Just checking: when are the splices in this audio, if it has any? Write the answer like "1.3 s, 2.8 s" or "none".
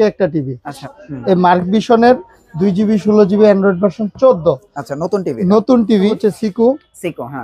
0.8 s, 6.2 s